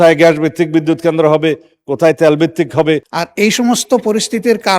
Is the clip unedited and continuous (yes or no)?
no